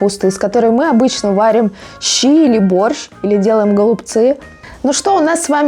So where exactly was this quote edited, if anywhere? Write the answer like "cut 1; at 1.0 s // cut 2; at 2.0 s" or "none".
none

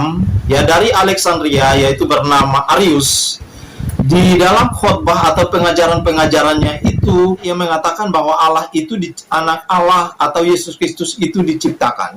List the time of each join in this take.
cut 1; at 7.5 s

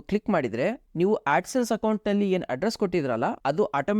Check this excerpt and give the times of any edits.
none

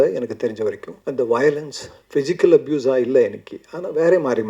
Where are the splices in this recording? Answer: cut 1; at 0.9 s

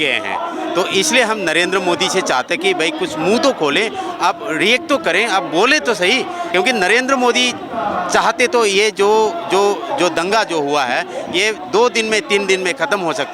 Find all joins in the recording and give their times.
cut 1; at 6.5 s

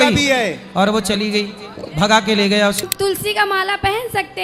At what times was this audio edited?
cut 1; at 2.9 s

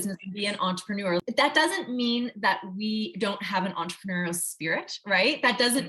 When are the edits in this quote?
cut 1; at 1.2 s

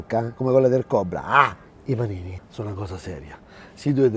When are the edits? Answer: cut 1; at 2.0 s

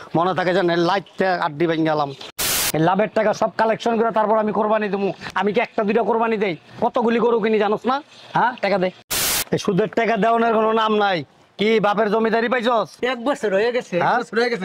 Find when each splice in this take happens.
cut 1; at 2.6 s // cut 2; at 9.3 s

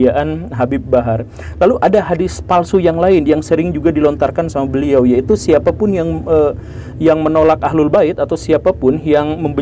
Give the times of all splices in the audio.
none

